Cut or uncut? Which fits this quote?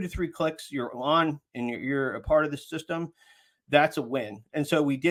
uncut